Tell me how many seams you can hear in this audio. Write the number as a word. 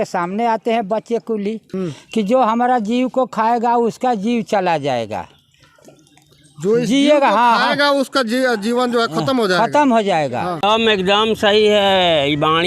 two